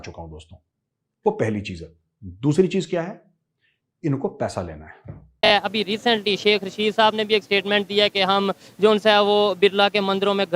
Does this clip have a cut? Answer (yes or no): yes